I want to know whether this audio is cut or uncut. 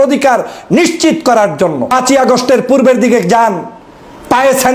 cut